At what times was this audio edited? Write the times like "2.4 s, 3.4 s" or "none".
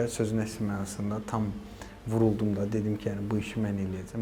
none